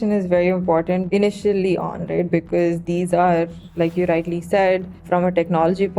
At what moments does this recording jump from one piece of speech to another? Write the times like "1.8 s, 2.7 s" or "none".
1.0 s, 3.6 s, 5.0 s